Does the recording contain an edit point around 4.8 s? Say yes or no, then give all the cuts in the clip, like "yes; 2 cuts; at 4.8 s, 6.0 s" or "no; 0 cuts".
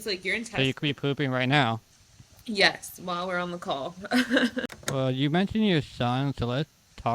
yes; 1 cut; at 4.8 s